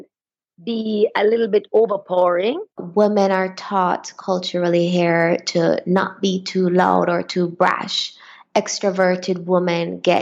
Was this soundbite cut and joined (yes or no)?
yes